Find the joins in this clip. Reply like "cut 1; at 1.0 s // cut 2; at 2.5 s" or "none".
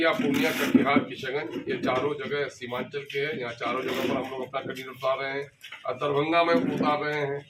none